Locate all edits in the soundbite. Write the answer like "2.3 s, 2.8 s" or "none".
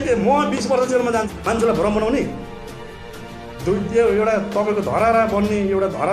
1.3 s